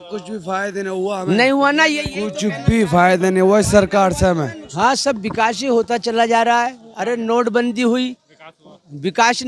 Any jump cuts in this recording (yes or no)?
yes